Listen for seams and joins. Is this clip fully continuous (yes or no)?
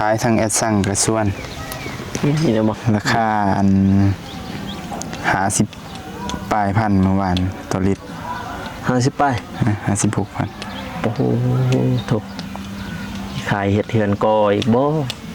no